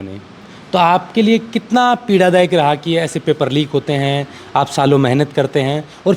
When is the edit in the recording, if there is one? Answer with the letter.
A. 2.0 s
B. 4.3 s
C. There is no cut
C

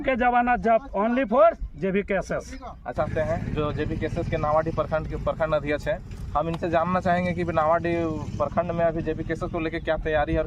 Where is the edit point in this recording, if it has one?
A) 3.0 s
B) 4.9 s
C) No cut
A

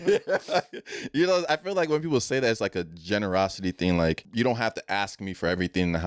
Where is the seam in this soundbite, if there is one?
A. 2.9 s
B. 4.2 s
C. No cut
B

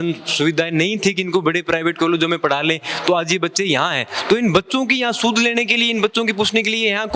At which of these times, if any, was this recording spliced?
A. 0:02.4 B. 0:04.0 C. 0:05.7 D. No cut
D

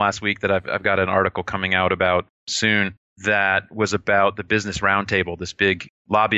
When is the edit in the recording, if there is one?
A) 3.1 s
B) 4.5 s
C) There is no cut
A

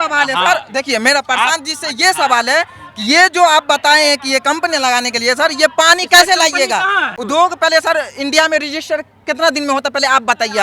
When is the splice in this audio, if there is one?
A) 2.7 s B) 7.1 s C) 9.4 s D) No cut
B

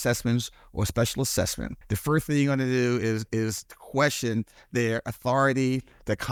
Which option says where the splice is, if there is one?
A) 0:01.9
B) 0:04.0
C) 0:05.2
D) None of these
D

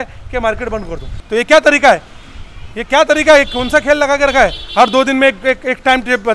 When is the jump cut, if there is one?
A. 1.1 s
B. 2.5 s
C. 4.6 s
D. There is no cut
A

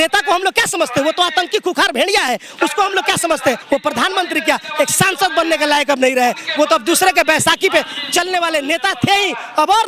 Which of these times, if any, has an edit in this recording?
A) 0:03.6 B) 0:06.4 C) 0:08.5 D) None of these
A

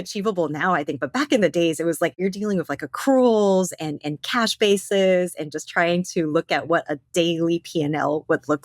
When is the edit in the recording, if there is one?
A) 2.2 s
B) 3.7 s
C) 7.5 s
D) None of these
A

